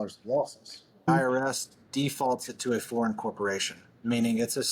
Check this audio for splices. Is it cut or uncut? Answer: cut